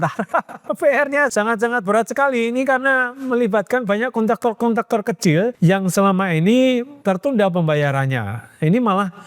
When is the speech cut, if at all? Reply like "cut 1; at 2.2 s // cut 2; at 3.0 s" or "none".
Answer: cut 1; at 1.3 s // cut 2; at 5.5 s // cut 3; at 7.1 s